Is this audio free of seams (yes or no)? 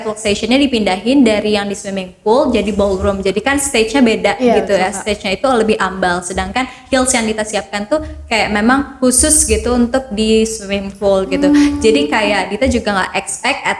yes